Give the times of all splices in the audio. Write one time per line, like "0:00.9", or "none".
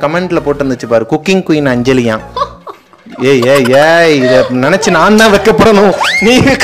none